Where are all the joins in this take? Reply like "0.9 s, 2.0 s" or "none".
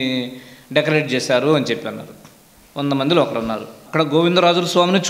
3.7 s